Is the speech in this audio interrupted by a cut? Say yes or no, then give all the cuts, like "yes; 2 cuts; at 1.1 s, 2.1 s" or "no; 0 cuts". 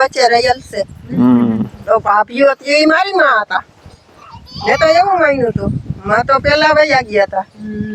no; 0 cuts